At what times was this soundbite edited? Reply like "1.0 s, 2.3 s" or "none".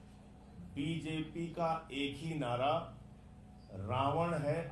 none

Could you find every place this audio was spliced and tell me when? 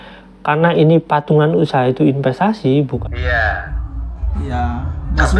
3.0 s

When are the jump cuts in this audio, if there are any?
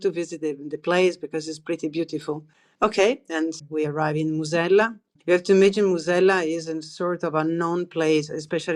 3.6 s, 5.1 s

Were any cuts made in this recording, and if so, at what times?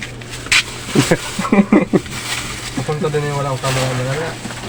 none

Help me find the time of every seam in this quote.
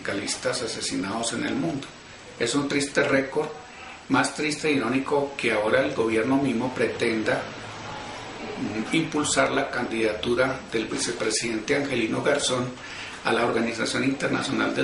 11.3 s

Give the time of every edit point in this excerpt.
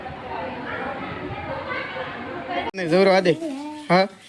2.7 s

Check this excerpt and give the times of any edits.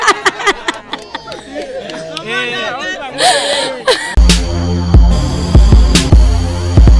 4.1 s

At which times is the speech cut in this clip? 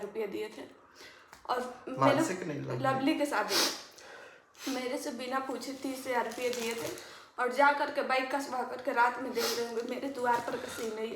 none

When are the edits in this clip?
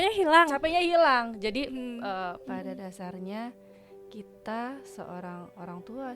2.4 s

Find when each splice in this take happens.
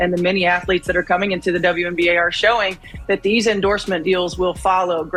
none

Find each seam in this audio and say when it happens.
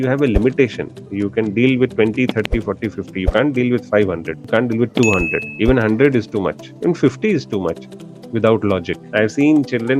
4.3 s, 5.5 s, 9.0 s

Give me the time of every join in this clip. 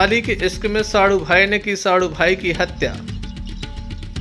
3.0 s

